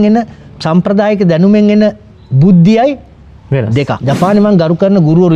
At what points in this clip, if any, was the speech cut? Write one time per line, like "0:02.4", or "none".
0:04.0